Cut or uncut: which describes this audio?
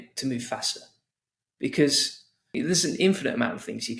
cut